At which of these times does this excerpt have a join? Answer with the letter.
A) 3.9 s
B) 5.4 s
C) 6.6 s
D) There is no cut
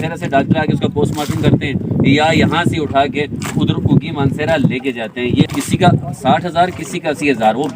B